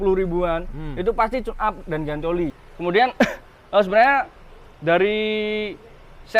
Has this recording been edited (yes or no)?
yes